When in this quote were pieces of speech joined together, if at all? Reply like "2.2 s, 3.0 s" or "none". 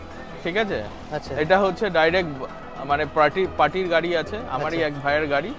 none